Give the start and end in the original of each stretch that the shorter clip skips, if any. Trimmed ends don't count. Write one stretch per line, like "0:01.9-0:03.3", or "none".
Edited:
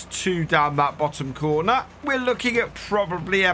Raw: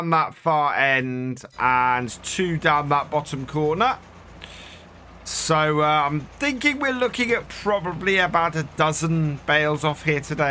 0:04.2-0:06.8